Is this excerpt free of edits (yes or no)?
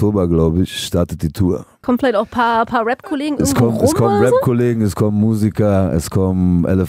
no